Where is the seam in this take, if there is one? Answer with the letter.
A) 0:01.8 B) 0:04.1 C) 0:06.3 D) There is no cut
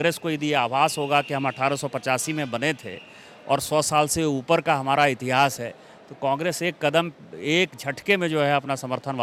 D